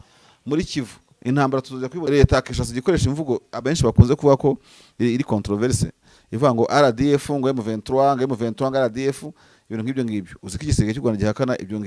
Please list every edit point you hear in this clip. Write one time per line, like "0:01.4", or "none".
0:02.0